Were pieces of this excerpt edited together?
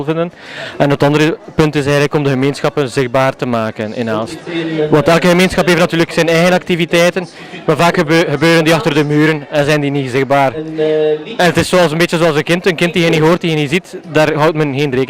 no; 0 cuts

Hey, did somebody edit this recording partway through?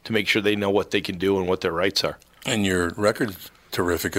no; 0 cuts

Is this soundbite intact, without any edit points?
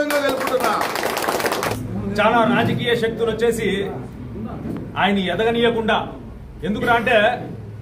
no; 1 cut; at 1.7 s

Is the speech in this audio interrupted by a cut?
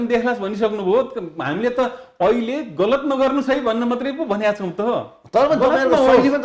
no; 0 cuts

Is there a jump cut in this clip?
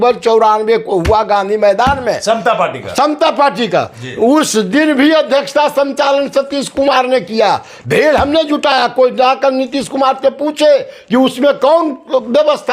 no; 0 cuts

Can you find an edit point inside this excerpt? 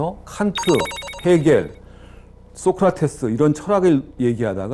no; 0 cuts

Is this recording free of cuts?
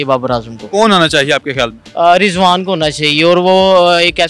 yes; 0 cuts

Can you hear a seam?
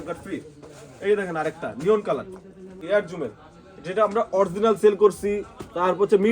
yes; 1 cut; at 2.8 s

